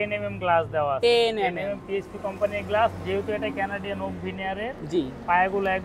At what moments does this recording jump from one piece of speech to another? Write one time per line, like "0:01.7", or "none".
none

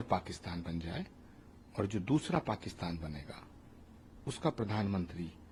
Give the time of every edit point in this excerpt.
none

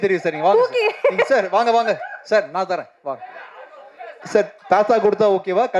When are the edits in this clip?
0:04.2

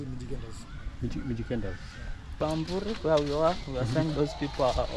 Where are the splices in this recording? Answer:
0:02.4

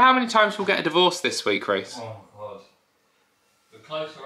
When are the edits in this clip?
none

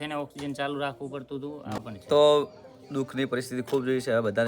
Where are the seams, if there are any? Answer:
0:01.8

